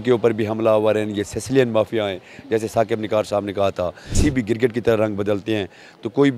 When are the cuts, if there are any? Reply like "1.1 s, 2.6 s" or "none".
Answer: 4.1 s